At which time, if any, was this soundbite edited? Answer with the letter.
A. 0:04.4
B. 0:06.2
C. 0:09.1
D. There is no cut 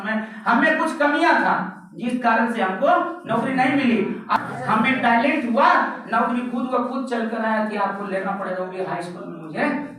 A